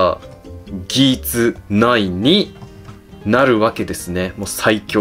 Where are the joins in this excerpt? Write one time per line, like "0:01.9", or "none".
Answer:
none